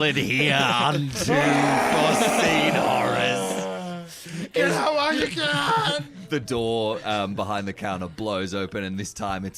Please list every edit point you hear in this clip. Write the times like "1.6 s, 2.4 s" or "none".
6.3 s

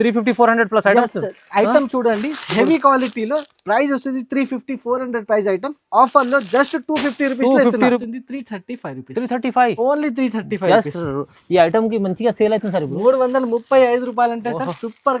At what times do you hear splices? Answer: 8.0 s

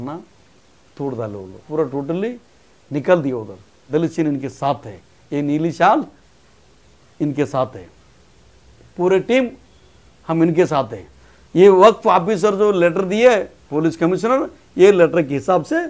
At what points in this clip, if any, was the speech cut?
1.5 s, 3.7 s

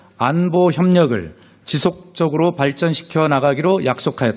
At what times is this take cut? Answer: 1.6 s

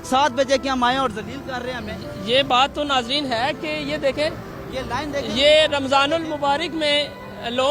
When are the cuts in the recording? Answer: none

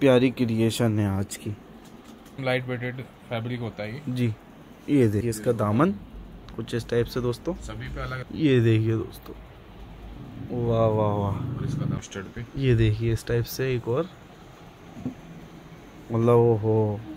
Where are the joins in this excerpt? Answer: 2.4 s, 5.2 s, 8.2 s, 12.0 s

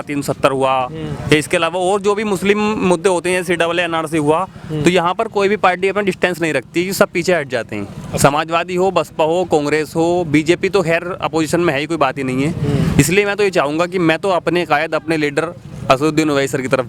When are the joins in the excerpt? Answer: none

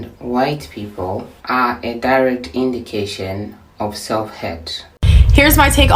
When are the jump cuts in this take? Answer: 4.9 s

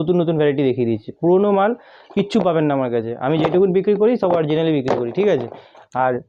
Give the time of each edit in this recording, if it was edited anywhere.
none

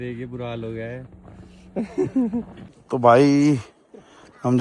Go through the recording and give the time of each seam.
none

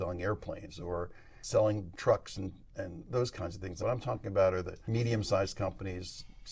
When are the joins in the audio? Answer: 1.9 s, 3.7 s, 4.8 s

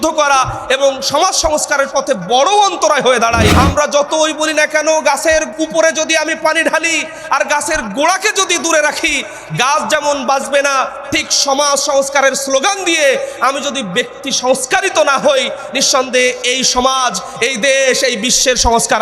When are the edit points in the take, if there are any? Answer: 3.5 s, 5.5 s

